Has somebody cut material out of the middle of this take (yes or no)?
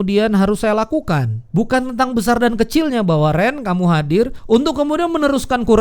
yes